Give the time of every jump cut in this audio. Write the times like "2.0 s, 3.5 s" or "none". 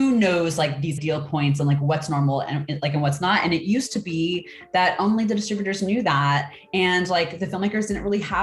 1.0 s